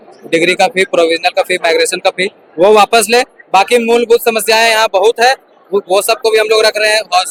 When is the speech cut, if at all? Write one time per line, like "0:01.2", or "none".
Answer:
none

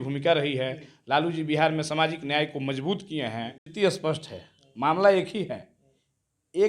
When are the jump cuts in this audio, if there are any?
0:03.6

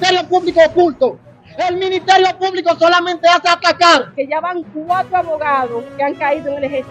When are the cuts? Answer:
0:04.1

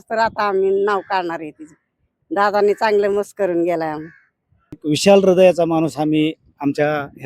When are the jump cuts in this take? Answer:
0:04.8

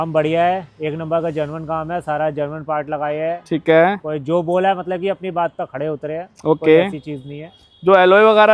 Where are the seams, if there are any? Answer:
none

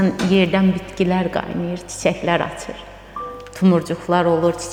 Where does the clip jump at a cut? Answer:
none

